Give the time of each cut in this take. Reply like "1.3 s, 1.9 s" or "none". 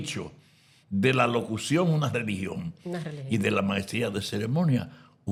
none